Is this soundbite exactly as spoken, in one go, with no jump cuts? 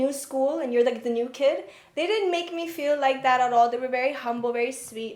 yes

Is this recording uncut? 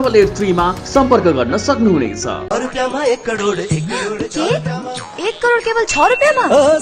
no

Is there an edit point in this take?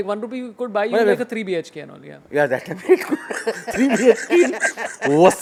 no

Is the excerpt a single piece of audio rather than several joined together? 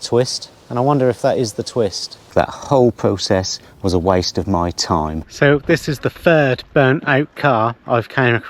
no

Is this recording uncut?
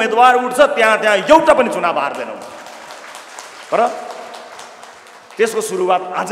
yes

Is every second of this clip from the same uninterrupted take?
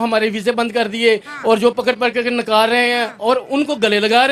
yes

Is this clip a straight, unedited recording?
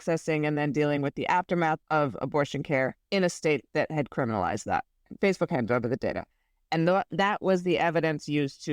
no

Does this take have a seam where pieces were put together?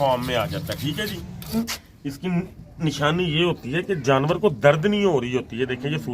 yes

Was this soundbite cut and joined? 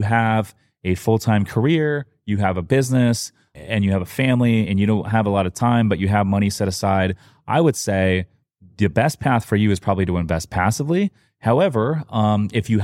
no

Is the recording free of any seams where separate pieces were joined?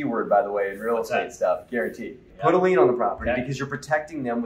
no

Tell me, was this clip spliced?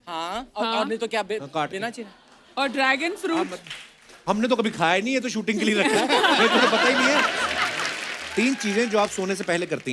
no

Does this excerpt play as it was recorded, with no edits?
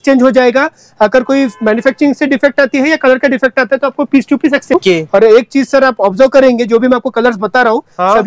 no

